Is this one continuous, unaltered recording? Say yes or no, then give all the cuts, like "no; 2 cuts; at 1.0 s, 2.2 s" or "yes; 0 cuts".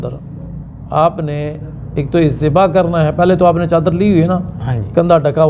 yes; 0 cuts